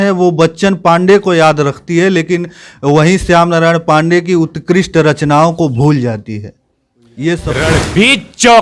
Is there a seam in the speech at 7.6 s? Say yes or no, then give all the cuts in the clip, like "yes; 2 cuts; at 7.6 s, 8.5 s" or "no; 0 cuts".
yes; 1 cut; at 7.6 s